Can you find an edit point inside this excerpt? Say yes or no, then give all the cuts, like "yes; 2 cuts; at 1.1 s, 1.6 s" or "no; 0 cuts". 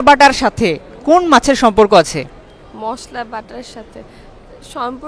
no; 0 cuts